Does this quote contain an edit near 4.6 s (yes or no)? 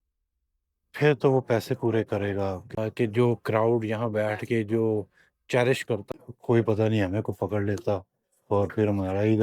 no